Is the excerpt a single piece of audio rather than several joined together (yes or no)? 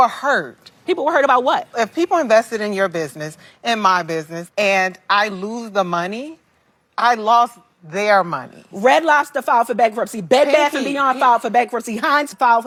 yes